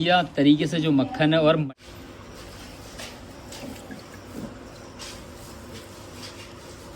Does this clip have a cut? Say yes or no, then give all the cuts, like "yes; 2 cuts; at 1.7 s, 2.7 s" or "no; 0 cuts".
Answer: yes; 1 cut; at 1.6 s